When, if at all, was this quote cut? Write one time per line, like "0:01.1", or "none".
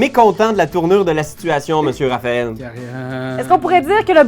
none